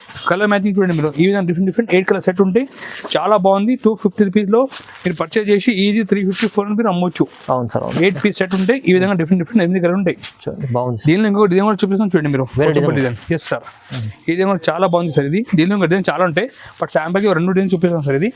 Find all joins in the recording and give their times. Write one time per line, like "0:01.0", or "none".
none